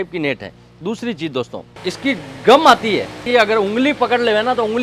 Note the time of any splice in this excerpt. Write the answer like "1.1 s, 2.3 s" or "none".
1.7 s, 3.2 s